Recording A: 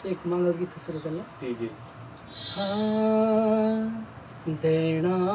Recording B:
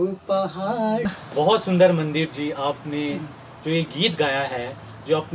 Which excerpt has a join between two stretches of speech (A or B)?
B